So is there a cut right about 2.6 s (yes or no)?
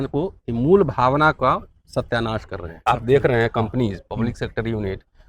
yes